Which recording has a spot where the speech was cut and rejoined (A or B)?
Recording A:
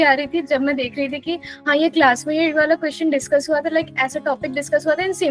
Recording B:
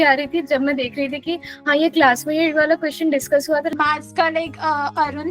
B